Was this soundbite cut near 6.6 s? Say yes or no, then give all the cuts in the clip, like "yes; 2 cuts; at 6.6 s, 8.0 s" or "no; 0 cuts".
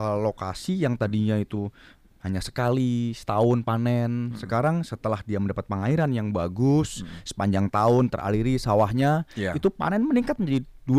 no; 0 cuts